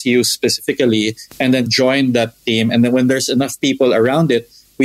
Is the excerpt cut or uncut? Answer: cut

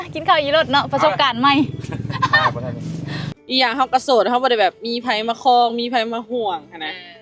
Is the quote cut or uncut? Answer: cut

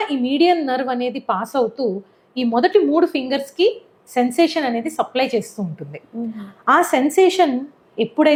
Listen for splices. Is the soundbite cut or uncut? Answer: uncut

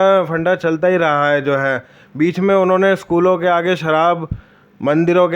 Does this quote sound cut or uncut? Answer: uncut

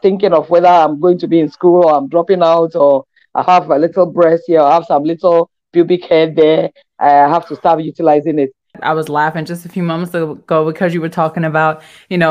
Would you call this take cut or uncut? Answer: cut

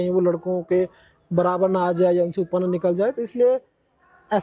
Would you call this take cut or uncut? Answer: uncut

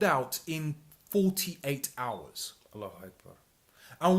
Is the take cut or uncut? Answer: uncut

